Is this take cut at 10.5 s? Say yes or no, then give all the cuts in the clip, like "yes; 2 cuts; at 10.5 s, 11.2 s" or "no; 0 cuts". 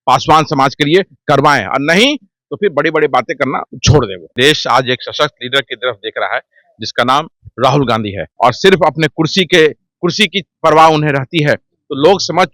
no; 2 cuts; at 4.3 s, 8.2 s